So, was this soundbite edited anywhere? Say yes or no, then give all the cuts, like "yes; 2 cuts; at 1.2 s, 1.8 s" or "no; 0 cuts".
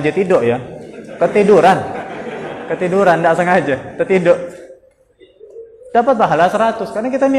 no; 0 cuts